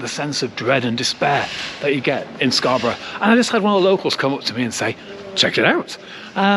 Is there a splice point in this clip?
no; 0 cuts

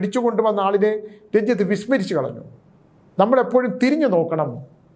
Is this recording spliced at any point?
no; 0 cuts

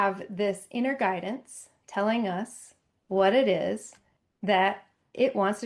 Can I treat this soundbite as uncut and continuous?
yes; 0 cuts

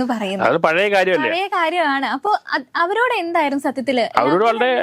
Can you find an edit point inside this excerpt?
no; 0 cuts

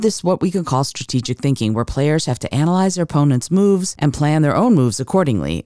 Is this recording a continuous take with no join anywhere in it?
yes; 0 cuts

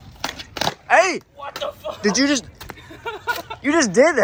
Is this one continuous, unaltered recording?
yes; 0 cuts

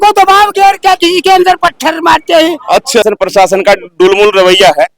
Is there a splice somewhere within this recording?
yes; 1 cut; at 3.0 s

